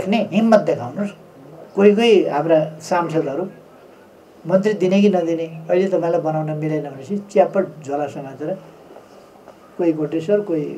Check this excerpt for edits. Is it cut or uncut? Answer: cut